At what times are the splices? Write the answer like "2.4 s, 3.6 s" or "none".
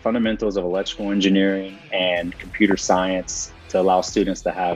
3.5 s